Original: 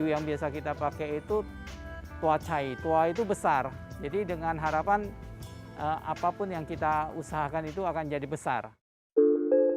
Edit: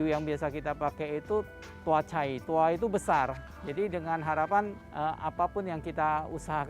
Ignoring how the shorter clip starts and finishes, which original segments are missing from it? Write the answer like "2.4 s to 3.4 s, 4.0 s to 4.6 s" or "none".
1.6 s to 2.0 s, 5.2 s to 5.7 s